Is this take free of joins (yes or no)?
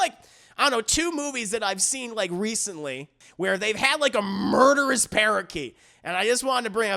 no